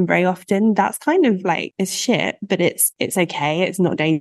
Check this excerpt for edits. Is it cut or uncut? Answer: cut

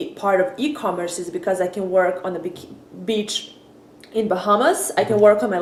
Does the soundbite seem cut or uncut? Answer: uncut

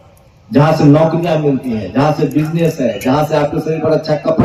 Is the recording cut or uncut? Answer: uncut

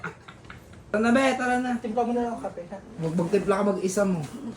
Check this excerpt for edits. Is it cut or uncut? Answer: cut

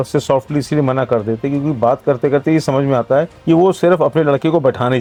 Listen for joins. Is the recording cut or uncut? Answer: uncut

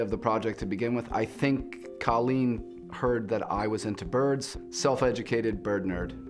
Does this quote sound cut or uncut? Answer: uncut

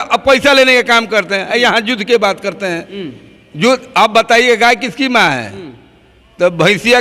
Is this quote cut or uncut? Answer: uncut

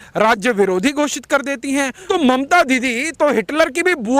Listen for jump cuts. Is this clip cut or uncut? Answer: cut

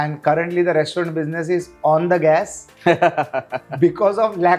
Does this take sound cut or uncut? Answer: uncut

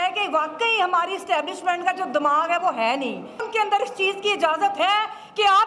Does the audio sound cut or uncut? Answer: cut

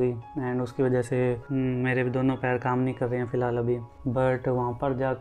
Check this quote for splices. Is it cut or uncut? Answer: cut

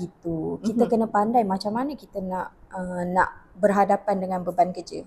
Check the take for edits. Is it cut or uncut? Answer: uncut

